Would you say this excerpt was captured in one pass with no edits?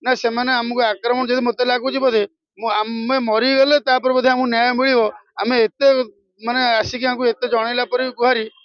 yes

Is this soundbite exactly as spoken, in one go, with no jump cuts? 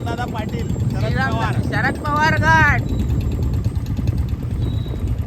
yes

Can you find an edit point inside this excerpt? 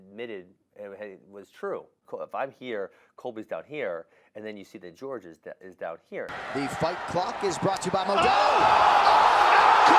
no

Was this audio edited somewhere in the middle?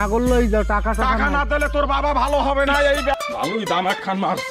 yes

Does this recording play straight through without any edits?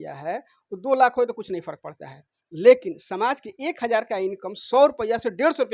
yes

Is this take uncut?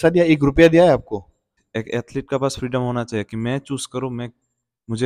no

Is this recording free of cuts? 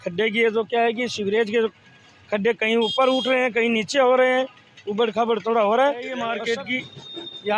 no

